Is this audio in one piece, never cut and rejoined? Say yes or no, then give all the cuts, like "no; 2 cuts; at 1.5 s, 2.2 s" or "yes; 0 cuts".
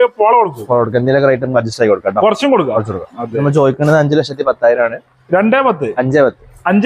no; 1 cut; at 3.4 s